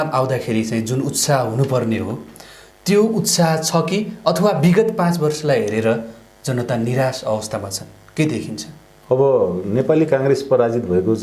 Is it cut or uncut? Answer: uncut